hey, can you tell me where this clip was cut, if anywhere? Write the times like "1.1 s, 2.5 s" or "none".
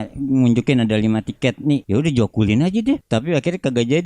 1.8 s, 3.0 s